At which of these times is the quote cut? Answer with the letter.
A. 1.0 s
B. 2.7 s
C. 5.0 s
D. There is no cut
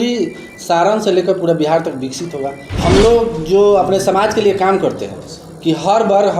B